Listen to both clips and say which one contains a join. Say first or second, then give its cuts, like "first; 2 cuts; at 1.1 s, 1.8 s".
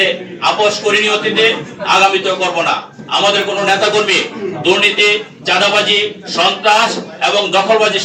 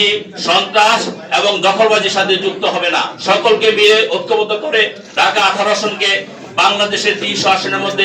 second; 2 cuts; at 3.1 s, 5.0 s